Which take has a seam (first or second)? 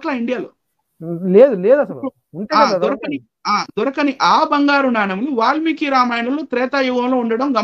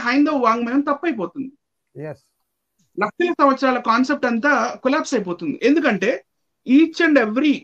second